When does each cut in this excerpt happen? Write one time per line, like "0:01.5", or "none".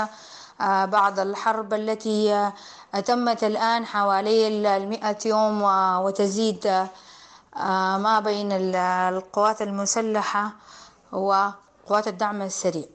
0:11.7